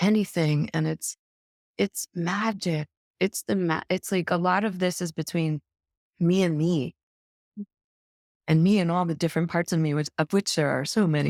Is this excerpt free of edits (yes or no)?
yes